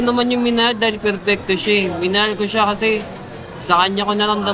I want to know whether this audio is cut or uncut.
uncut